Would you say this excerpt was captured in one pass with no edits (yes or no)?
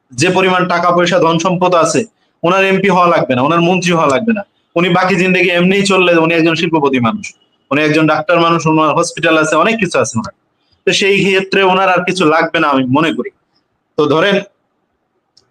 yes